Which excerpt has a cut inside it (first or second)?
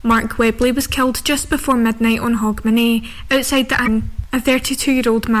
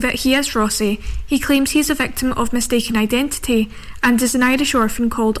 first